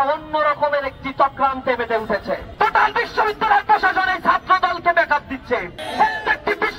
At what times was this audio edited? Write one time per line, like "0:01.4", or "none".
0:02.5
0:05.8